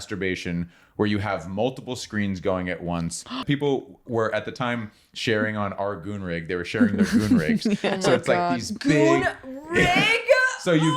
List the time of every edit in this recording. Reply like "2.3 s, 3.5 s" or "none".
3.4 s